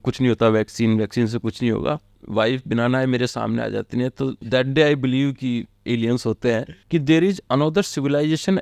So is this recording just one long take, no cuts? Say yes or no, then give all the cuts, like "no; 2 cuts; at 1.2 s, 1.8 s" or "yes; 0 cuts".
no; 2 cuts; at 2.2 s, 6.8 s